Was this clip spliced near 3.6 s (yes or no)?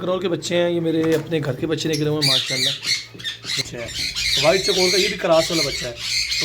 yes